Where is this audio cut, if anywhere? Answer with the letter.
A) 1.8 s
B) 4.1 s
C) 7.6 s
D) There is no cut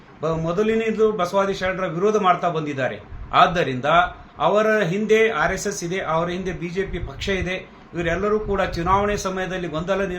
D